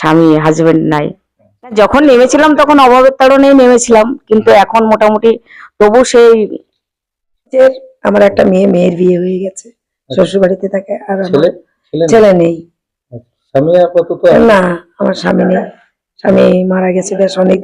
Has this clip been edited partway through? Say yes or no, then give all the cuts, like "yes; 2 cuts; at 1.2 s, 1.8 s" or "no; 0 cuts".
yes; 2 cuts; at 1.7 s, 7.5 s